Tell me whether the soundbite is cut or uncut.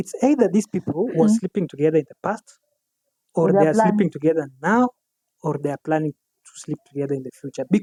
uncut